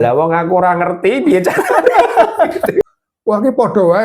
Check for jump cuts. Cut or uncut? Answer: cut